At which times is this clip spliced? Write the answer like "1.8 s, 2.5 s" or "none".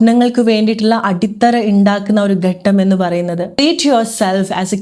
3.6 s

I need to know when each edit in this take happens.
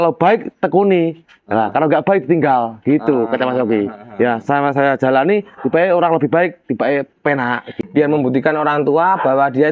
7.7 s

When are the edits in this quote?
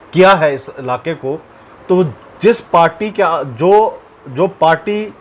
none

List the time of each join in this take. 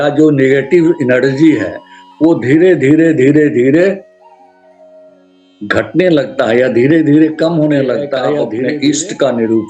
8.5 s

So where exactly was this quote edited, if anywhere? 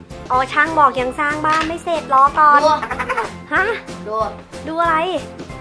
none

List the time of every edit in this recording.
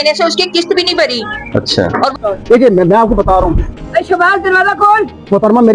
2.1 s

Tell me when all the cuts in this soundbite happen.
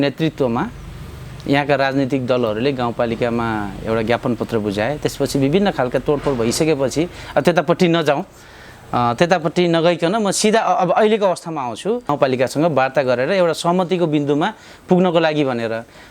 12.1 s

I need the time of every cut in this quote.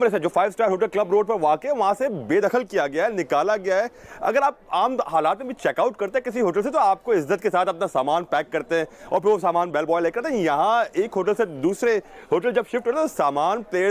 none

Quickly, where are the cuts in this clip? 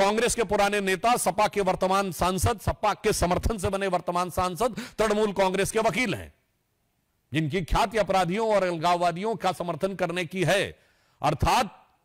none

